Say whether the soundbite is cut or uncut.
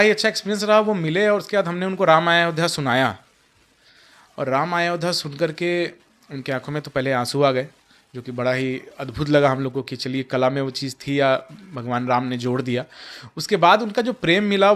uncut